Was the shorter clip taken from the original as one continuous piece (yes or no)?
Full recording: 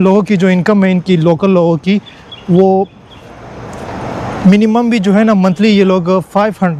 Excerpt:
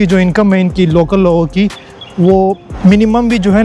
no